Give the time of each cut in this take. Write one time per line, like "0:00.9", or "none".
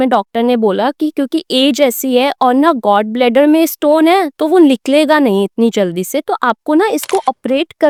none